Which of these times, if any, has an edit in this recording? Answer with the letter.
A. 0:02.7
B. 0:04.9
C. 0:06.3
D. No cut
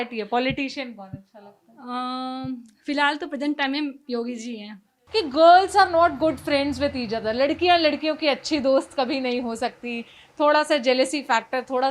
B